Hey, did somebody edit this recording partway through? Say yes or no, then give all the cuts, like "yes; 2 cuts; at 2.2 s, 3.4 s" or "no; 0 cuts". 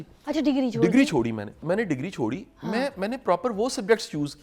yes; 1 cut; at 1.6 s